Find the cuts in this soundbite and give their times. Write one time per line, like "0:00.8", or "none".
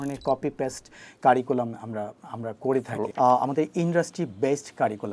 0:03.0